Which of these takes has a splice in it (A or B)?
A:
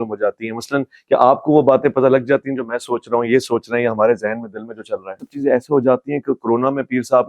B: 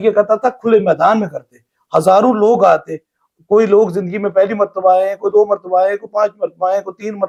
A